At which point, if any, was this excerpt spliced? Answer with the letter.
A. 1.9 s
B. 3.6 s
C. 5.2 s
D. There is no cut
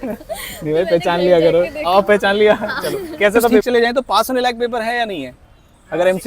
B